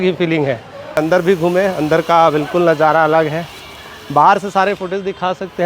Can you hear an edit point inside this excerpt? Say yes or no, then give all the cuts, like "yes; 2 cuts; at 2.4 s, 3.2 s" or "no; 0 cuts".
yes; 1 cut; at 1.0 s